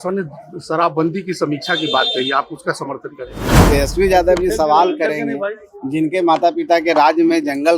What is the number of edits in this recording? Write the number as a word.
one